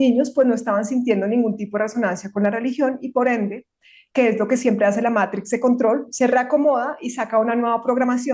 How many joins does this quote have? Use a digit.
0